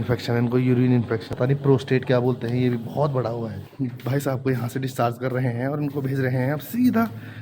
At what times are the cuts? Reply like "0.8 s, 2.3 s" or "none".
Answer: 1.3 s, 3.6 s